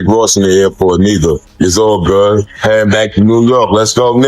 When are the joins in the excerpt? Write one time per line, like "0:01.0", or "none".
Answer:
0:01.5
0:02.5